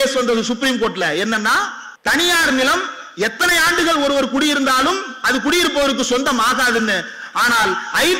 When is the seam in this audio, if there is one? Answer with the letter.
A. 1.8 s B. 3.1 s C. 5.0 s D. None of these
A